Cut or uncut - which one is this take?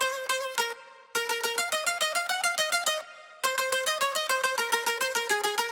uncut